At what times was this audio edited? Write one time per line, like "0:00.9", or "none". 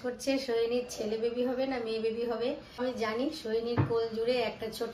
0:02.8